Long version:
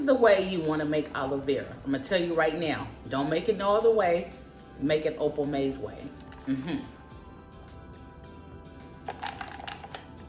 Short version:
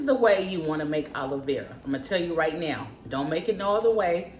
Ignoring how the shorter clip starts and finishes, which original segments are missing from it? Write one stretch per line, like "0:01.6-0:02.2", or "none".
none